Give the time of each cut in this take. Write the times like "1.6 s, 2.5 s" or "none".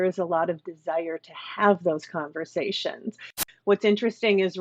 3.4 s